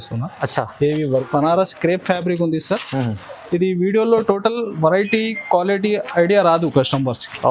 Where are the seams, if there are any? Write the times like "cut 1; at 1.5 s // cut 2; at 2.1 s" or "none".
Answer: cut 1; at 1.1 s